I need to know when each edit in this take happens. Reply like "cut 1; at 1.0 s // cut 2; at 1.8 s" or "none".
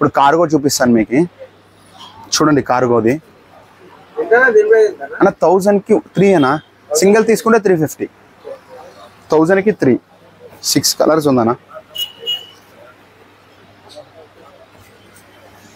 none